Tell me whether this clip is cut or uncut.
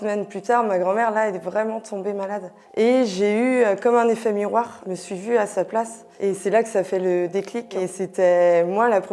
cut